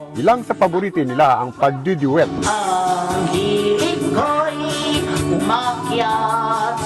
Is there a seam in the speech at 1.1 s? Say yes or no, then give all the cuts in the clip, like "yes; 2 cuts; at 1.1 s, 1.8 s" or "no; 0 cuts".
no; 1 cut; at 2.4 s